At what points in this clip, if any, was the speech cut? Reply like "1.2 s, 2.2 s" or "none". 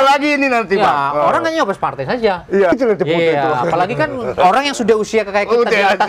2.7 s